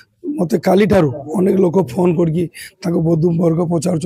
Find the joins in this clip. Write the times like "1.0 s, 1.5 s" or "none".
none